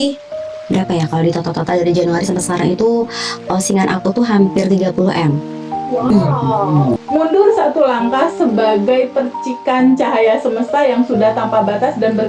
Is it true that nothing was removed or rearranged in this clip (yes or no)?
no